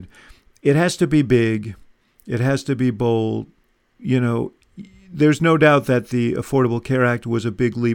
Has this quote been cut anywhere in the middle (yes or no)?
yes